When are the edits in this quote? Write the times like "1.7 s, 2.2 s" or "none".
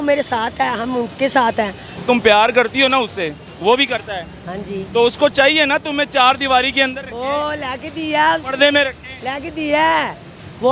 1.8 s